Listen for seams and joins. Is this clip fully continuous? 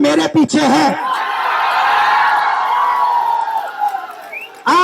yes; 0 cuts

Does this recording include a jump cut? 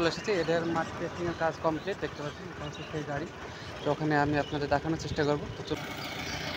yes; 2 cuts; at 3.8 s, 5.8 s

